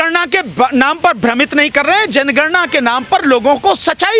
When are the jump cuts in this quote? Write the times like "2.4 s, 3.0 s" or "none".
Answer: none